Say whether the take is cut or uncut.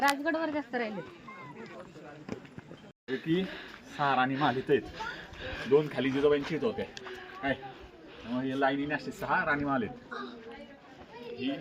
cut